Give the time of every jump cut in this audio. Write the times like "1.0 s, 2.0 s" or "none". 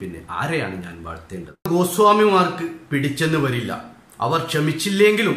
1.7 s

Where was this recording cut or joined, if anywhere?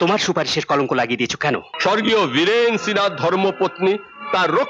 1.7 s

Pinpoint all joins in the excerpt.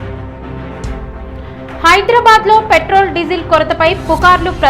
0.9 s

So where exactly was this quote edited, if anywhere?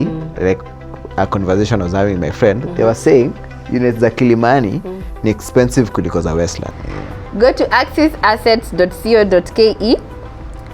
6.7 s

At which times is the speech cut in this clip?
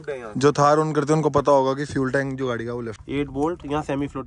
2.9 s

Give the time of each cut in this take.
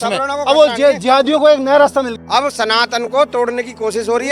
2.2 s

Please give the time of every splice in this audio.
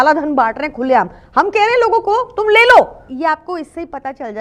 3.0 s

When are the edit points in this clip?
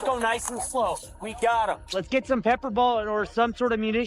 1.8 s

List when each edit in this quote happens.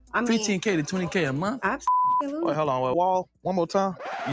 2.9 s

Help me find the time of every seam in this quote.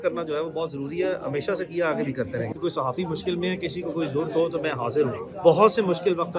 2.5 s, 5.3 s

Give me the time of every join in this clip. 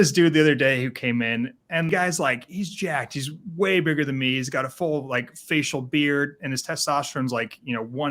1.9 s

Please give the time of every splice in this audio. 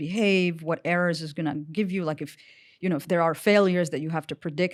none

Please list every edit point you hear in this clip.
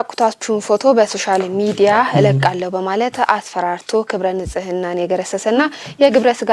none

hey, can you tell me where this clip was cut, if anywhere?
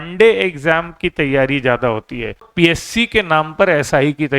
2.4 s

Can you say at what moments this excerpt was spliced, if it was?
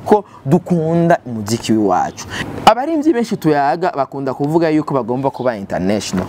2.3 s

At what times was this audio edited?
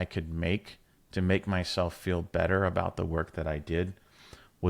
none

